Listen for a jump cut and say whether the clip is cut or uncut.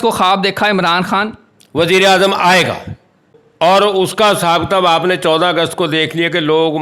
cut